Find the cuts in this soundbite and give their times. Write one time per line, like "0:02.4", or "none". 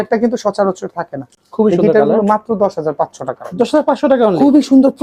none